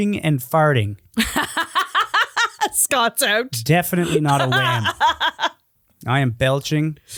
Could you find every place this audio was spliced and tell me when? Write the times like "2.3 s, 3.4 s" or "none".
none